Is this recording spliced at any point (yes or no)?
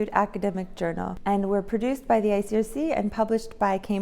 yes